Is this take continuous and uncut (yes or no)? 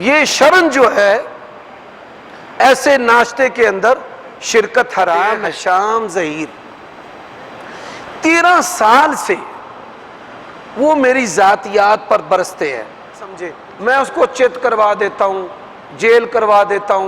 no